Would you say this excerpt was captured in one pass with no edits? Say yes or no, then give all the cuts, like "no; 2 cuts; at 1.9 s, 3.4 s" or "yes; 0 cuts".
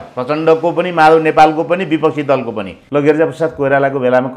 no; 1 cut; at 2.7 s